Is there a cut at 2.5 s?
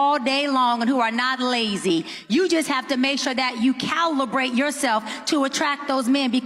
no; 0 cuts

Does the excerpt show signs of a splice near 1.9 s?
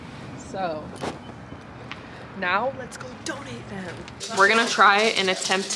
no; 1 cut; at 4.2 s

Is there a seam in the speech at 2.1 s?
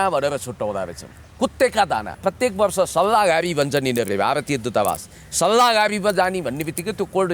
yes; 1 cut; at 2.1 s

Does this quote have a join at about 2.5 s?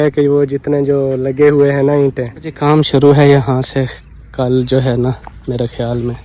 yes; 1 cut; at 2.5 s

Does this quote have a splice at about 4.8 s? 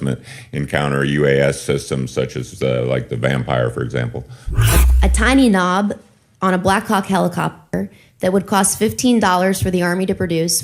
yes; 1 cut; at 4.8 s

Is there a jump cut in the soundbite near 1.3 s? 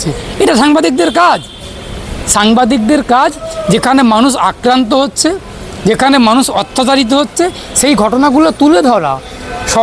no; 0 cuts

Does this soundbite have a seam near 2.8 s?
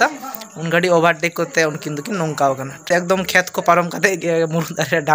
yes; 1 cut; at 2.8 s

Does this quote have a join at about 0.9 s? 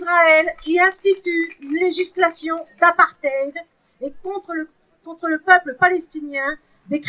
no; 0 cuts

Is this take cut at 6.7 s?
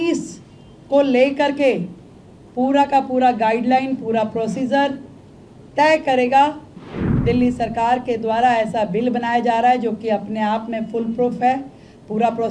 yes; 1 cut; at 6.7 s

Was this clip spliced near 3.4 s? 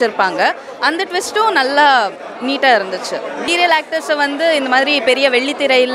yes; 1 cut; at 3.4 s

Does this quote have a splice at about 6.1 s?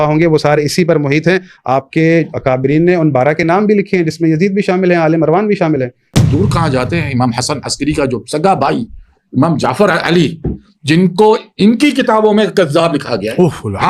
yes; 1 cut; at 6.1 s

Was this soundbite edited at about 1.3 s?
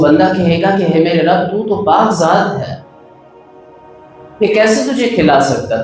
no; 2 cuts; at 2.9 s, 4.4 s

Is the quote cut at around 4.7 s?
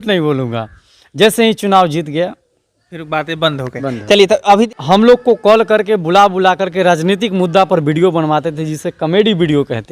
yes; 1 cut; at 4.7 s

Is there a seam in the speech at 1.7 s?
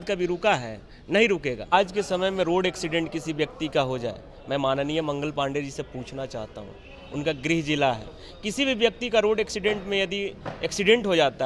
yes; 1 cut; at 1.7 s

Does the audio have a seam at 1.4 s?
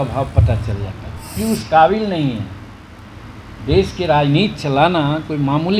yes; 1 cut; at 1.4 s

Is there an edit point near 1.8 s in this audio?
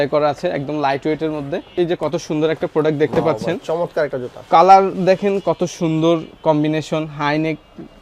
yes; 1 cut; at 1.8 s

